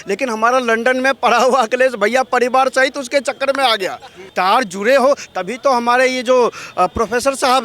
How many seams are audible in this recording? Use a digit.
1